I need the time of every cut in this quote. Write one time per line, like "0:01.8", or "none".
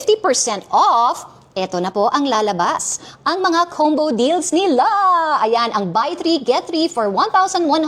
none